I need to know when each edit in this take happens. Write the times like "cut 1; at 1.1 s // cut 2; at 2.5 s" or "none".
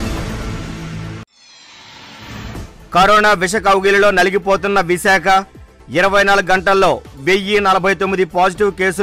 cut 1; at 1.1 s // cut 2; at 2.2 s